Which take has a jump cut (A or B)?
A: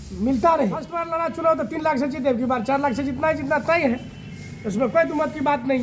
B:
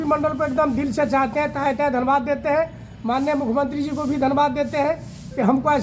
A